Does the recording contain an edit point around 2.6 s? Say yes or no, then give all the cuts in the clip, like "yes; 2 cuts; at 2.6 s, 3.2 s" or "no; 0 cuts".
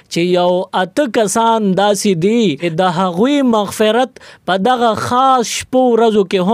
yes; 1 cut; at 2.6 s